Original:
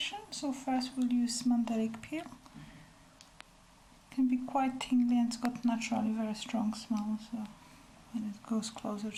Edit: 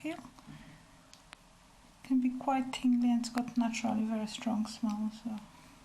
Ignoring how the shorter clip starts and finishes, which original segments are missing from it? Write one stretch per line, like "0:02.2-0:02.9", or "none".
none